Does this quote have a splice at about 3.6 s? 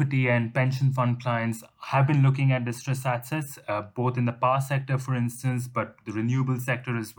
no; 0 cuts

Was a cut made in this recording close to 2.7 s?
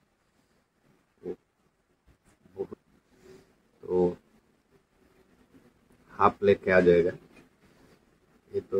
yes; 1 cut; at 2.7 s

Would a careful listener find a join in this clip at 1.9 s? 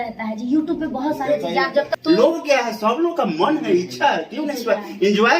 yes; 1 cut; at 1.9 s

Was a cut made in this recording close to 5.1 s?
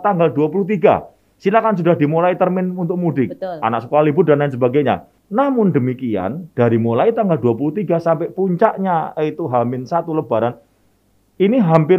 yes; 1 cut; at 5.1 s

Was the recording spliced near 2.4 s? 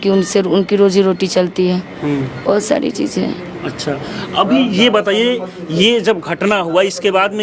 no; 0 cuts

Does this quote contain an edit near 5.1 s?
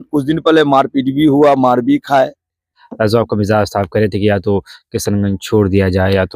no; 1 cut; at 2.8 s

